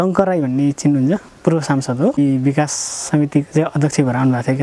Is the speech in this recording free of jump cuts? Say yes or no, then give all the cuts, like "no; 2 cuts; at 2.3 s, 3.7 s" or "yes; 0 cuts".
no; 2 cuts; at 1.3 s, 2.2 s